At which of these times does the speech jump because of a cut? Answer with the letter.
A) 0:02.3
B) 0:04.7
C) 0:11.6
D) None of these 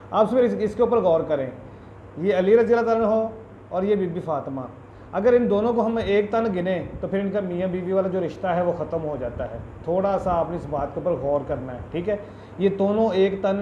D